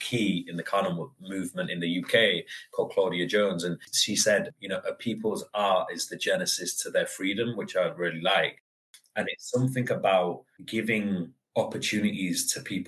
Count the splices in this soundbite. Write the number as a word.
one